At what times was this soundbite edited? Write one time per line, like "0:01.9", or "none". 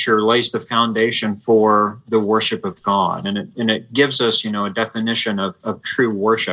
none